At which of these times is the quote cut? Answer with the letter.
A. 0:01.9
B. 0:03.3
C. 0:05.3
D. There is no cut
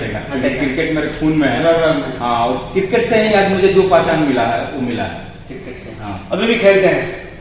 D